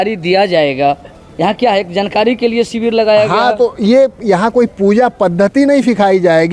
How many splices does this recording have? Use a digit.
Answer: 0